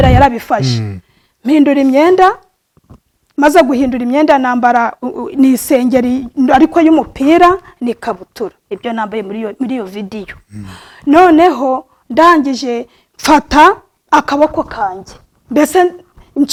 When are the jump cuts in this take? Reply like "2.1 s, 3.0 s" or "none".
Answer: none

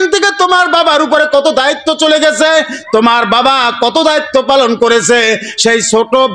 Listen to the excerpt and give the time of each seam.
none

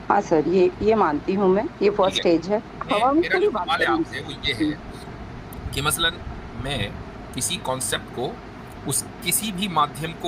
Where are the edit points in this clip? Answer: 2.8 s

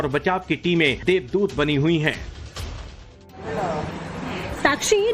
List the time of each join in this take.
4.1 s

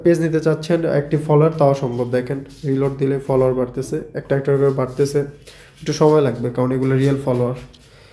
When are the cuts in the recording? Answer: none

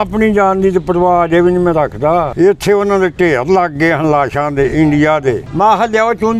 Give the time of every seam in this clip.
2.3 s, 5.5 s

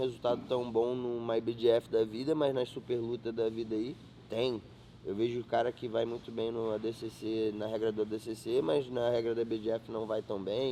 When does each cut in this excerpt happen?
none

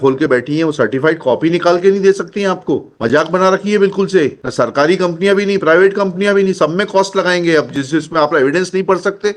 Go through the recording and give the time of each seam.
2.9 s, 4.4 s

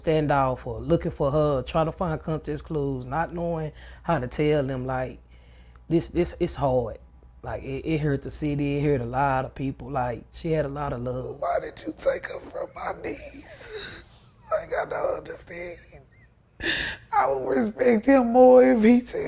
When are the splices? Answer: 11.3 s

